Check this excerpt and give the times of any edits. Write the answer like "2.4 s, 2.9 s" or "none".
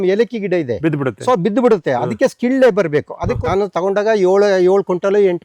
3.2 s